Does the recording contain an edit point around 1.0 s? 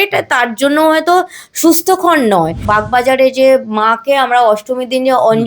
no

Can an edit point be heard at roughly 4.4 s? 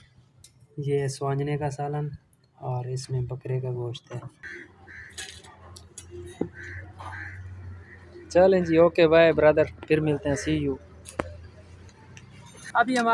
yes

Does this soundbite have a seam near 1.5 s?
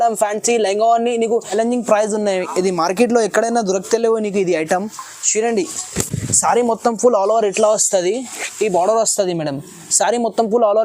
yes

